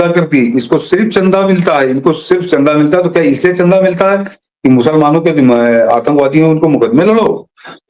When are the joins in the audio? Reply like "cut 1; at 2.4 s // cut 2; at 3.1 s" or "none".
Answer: none